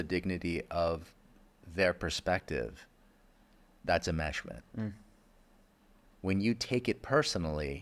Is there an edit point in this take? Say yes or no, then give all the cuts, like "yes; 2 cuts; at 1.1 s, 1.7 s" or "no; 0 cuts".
no; 0 cuts